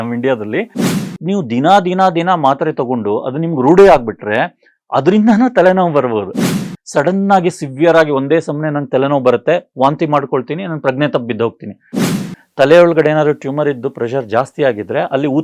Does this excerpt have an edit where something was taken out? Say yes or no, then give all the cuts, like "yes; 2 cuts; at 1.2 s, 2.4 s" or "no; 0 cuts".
yes; 3 cuts; at 1.1 s, 6.5 s, 12.0 s